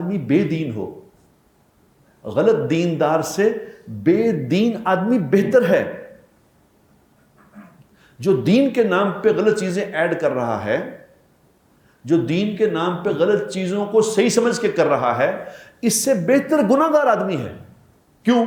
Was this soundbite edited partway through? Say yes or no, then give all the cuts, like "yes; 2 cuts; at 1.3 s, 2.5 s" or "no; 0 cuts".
no; 0 cuts